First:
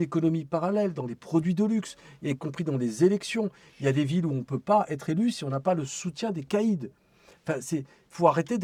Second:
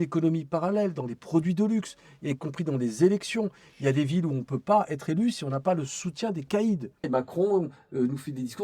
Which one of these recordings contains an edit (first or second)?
second